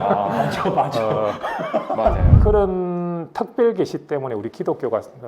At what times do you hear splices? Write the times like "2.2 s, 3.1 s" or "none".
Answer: 2.3 s